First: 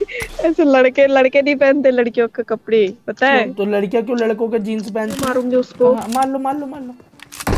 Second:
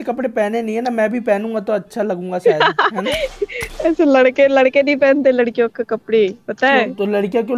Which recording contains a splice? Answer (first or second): first